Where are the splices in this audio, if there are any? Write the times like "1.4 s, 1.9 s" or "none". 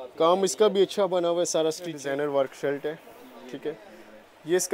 2.0 s